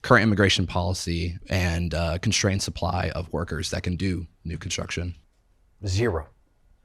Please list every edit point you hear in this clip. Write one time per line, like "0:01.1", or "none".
0:01.4
0:05.2